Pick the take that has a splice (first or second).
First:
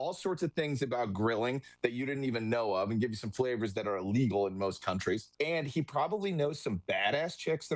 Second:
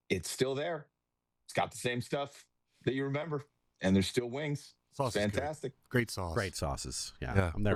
first